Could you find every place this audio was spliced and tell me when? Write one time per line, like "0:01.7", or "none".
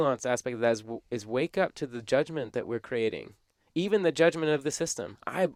none